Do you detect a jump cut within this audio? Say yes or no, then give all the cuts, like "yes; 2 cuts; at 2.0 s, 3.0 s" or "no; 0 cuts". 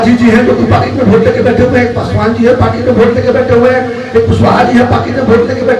no; 0 cuts